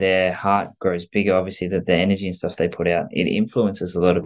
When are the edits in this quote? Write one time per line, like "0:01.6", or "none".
none